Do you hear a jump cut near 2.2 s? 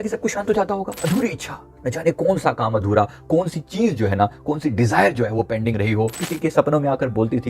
no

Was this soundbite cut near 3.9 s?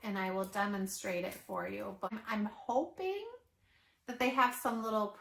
no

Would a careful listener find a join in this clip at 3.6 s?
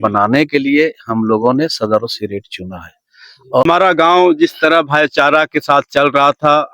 yes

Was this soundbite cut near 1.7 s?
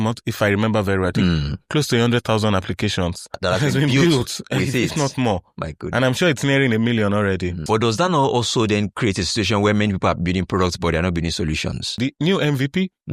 no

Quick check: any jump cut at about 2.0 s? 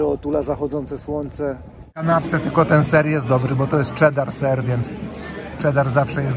yes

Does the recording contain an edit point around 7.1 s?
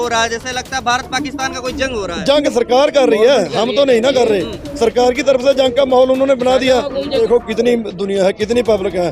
yes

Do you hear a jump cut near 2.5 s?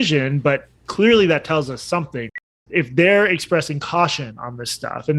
yes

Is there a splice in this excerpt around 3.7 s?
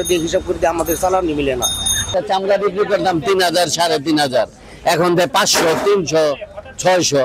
no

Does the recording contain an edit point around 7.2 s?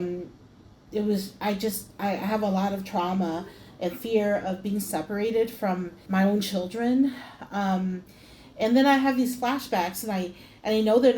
no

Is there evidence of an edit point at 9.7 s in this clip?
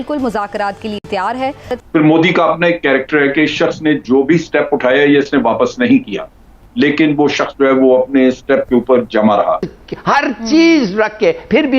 yes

